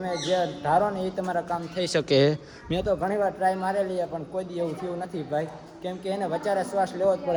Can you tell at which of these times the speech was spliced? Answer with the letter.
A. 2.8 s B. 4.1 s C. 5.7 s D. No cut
D